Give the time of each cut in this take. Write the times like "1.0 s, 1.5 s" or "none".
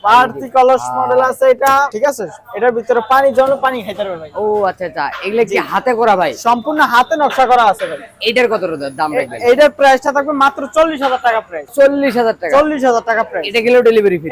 none